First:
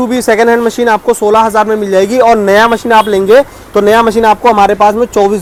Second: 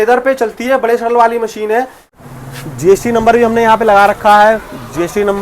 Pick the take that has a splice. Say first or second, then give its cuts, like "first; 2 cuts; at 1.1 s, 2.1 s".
second; 1 cut; at 2.2 s